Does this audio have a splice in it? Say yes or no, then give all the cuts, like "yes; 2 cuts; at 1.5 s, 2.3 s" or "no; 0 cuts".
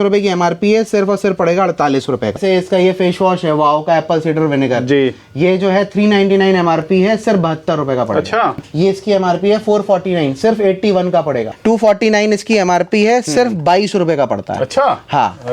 yes; 3 cuts; at 2.4 s, 8.7 s, 11.5 s